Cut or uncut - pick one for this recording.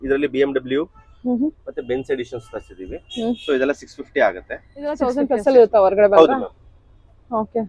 cut